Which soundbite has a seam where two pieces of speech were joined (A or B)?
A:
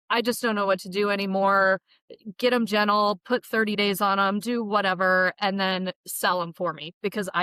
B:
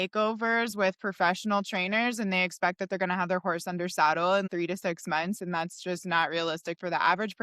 B